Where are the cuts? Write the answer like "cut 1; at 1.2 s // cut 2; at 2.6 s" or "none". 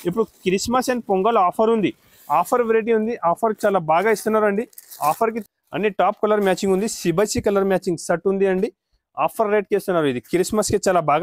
cut 1; at 5.4 s